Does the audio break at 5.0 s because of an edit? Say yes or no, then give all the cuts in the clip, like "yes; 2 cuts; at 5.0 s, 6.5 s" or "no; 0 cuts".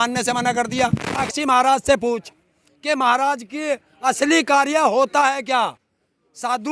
no; 1 cut; at 1.2 s